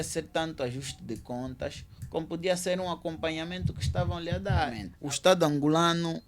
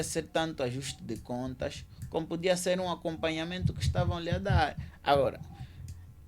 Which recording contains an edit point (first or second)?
first